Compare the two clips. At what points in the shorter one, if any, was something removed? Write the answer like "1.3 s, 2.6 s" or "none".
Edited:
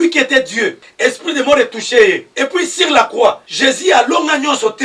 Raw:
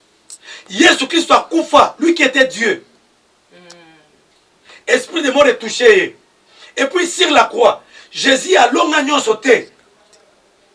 0.8 s, 2.3 s, 3.5 s